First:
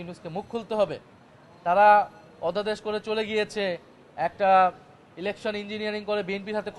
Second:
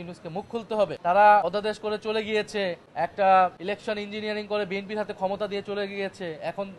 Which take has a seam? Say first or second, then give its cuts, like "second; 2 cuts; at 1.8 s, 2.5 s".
second; 4 cuts; at 1.0 s, 1.4 s, 2.8 s, 3.6 s